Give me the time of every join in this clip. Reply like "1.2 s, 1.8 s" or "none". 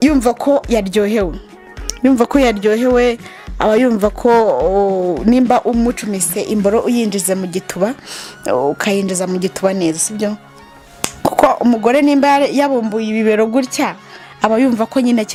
none